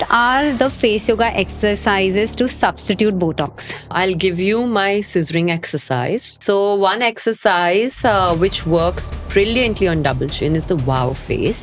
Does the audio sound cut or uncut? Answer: cut